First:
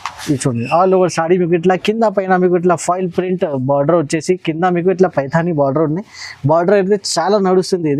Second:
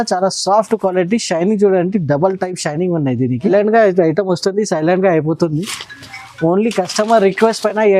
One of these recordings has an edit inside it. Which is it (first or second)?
second